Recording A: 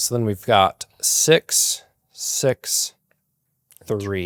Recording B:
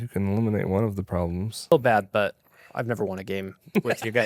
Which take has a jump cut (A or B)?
B